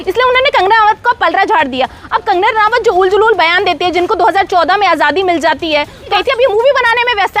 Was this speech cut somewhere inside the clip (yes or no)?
yes